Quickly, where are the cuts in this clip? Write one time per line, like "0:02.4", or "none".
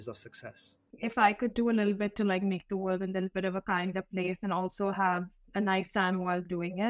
0:00.9